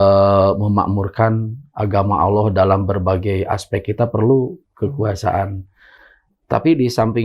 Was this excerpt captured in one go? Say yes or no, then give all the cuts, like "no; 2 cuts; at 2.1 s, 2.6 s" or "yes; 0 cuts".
yes; 0 cuts